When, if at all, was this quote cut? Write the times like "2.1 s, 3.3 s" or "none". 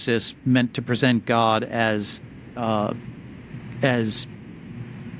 2.6 s